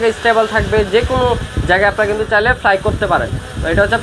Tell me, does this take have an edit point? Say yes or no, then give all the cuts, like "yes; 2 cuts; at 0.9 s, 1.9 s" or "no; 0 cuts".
no; 0 cuts